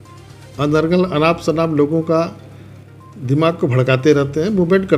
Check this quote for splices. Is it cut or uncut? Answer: uncut